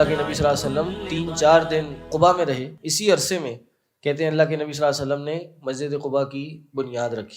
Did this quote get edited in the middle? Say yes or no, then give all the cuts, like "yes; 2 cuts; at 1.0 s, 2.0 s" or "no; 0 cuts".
yes; 3 cuts; at 1.0 s, 2.1 s, 2.8 s